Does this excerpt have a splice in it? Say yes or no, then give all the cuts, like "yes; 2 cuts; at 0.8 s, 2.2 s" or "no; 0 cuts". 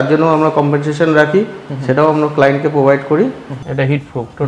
yes; 1 cut; at 3.5 s